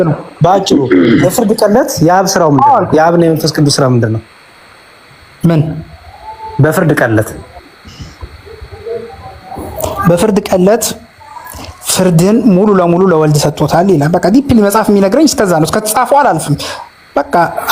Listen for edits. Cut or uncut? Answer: uncut